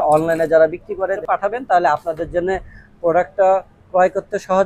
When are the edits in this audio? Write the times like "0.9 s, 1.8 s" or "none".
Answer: 1.2 s